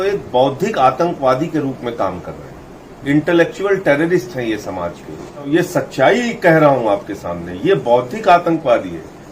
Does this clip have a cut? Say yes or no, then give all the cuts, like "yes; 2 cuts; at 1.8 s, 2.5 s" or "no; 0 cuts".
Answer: yes; 1 cut; at 5.7 s